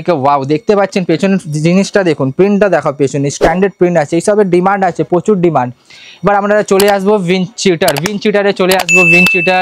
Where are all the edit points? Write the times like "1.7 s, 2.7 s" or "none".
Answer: none